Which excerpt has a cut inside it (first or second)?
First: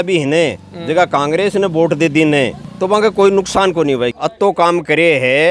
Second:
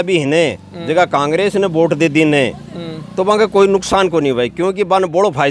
first